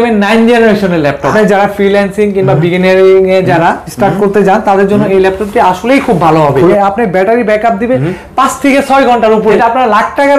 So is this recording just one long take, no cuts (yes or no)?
no